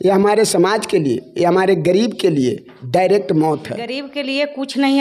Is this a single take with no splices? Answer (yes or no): no